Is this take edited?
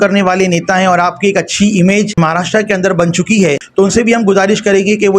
yes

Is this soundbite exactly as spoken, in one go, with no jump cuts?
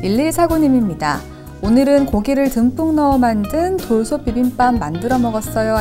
yes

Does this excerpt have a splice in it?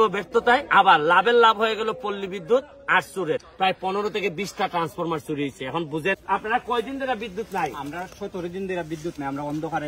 yes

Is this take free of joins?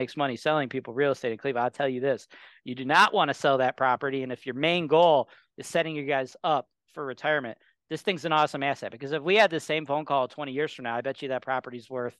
yes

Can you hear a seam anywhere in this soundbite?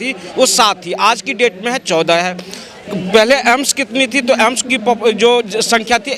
no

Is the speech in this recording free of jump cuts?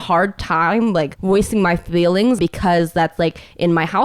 no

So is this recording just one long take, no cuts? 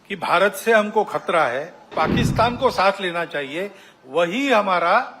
no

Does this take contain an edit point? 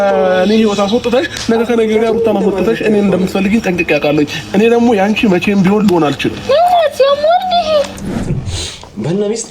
yes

